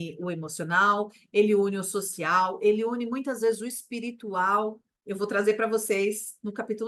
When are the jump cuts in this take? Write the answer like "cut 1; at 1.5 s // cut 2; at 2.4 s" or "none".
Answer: cut 1; at 4.9 s

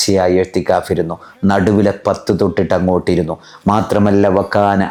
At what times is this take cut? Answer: none

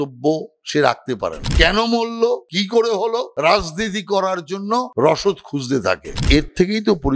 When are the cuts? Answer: cut 1; at 1.4 s // cut 2; at 2.5 s // cut 3; at 3.3 s // cut 4; at 4.9 s // cut 5; at 6.2 s

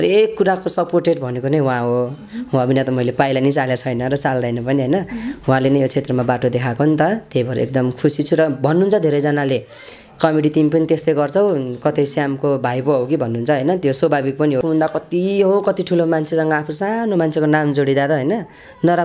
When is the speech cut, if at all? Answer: cut 1; at 14.6 s

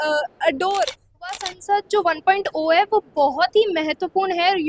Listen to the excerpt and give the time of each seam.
cut 1; at 1.4 s

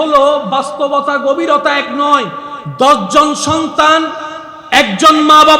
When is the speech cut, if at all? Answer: cut 1; at 2.6 s

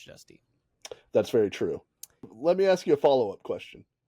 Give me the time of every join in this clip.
cut 1; at 2.3 s

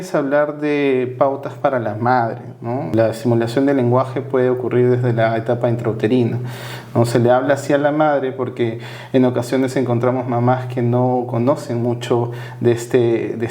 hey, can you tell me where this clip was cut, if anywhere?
cut 1; at 2.9 s

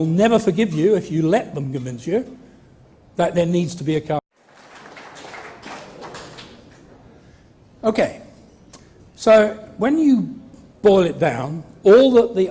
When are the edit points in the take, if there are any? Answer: none

